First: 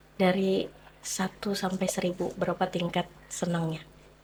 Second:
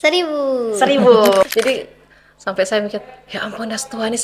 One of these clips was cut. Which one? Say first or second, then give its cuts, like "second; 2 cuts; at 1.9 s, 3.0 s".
second; 1 cut; at 1.4 s